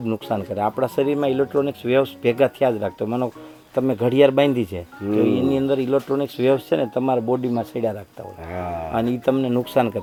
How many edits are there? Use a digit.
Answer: 0